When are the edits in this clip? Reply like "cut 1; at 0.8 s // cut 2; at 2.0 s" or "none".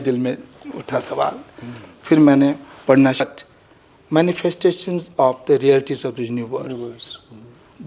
cut 1; at 3.2 s